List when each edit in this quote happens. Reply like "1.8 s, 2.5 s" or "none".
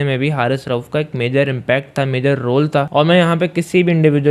2.9 s